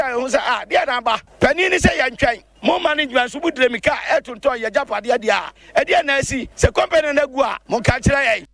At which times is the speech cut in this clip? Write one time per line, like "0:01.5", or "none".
0:01.3
0:02.5
0:05.5
0:06.4
0:07.6